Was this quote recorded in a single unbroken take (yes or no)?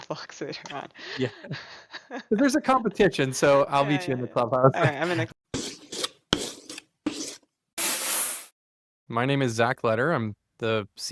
no